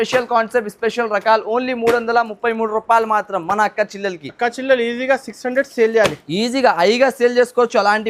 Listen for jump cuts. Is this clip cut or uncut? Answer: uncut